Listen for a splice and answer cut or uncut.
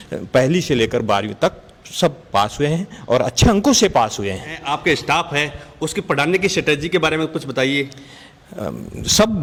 uncut